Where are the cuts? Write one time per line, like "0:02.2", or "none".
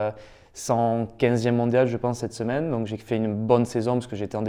none